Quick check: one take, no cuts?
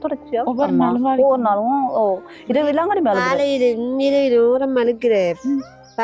yes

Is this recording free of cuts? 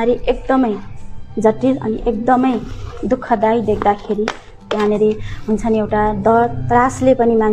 yes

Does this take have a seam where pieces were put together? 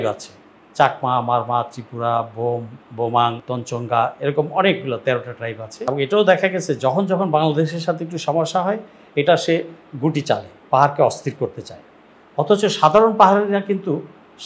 yes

